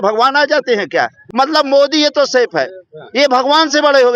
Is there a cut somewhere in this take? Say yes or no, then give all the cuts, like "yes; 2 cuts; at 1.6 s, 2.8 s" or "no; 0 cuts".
yes; 1 cut; at 1.2 s